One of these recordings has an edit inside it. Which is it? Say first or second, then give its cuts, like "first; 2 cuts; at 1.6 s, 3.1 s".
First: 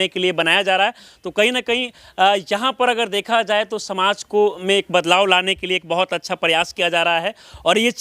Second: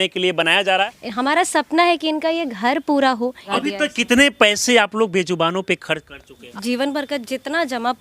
second; 3 cuts; at 1.0 s, 3.5 s, 6.5 s